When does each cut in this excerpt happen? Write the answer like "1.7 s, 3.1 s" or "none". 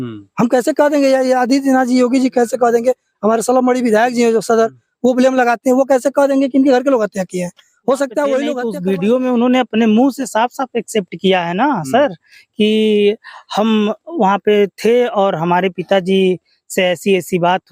8.6 s